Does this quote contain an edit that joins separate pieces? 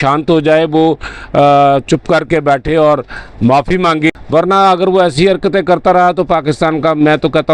yes; 1 cut; at 4.1 s

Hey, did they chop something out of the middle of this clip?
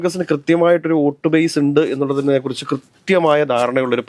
no; 0 cuts

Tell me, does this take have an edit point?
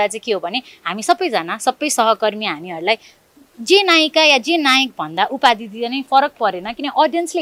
no; 0 cuts

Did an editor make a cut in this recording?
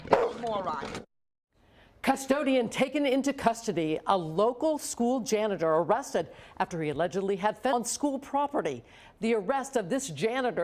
yes; 1 cut; at 7.7 s

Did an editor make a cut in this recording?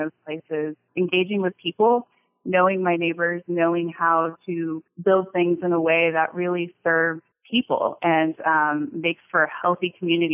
yes; 3 cuts; at 0.8 s, 4.9 s, 7.3 s

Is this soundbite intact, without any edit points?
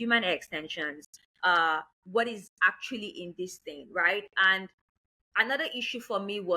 yes; 0 cuts

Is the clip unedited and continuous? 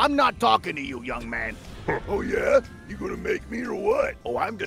yes; 0 cuts

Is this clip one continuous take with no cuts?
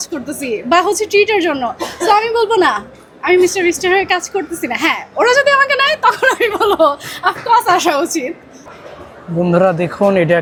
yes; 0 cuts

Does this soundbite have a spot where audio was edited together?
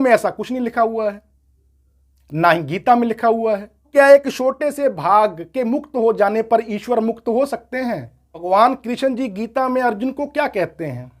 yes; 2 cuts; at 3.9 s, 8.4 s

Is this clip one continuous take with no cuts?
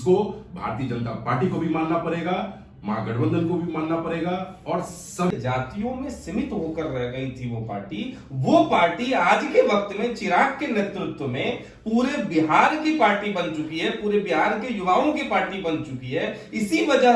no; 1 cut; at 5.3 s

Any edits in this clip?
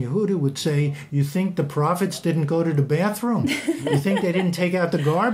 no; 0 cuts

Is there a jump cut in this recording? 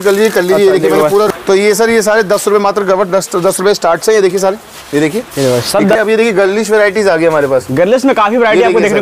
yes; 2 cuts; at 1.3 s, 5.9 s

